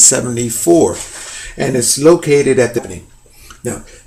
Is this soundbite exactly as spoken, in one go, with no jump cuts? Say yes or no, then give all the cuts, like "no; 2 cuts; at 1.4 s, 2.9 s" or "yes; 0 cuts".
yes; 0 cuts